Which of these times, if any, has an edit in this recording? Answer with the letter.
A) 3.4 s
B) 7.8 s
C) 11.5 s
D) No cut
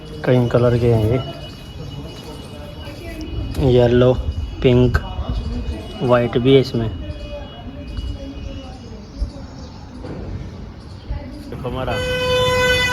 C